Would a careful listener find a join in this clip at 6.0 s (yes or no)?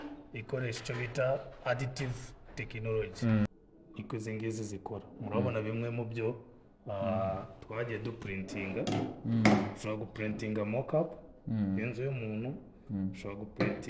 no